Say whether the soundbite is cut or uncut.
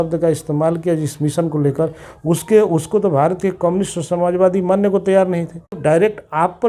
cut